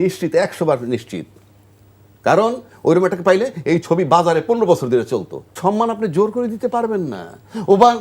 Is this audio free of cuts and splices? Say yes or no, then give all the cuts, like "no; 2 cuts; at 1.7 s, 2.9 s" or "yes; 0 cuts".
no; 1 cut; at 5.4 s